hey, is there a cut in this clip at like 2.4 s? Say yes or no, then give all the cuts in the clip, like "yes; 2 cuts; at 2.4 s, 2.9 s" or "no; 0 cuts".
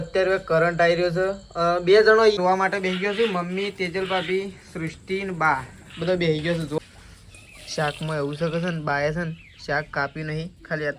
yes; 2 cuts; at 2.4 s, 6.8 s